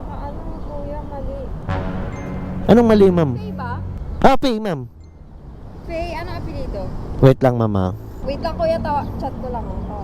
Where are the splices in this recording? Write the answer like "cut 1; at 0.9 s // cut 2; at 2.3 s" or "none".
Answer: cut 1; at 8.1 s